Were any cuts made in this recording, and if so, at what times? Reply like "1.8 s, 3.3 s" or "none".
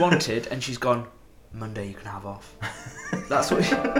none